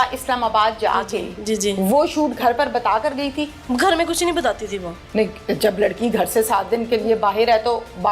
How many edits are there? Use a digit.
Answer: 1